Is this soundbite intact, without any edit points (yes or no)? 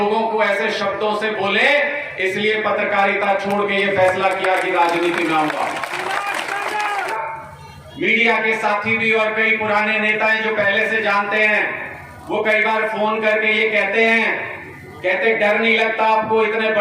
no